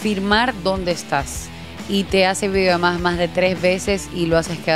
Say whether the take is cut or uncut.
uncut